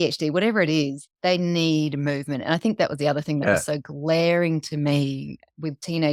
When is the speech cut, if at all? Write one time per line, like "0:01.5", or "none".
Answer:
none